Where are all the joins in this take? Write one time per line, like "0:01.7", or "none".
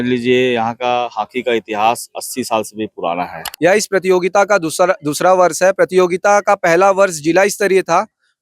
0:03.4